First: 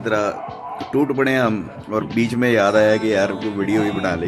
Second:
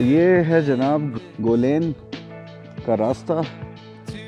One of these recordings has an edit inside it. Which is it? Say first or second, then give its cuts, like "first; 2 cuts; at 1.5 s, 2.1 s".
second; 1 cut; at 1.1 s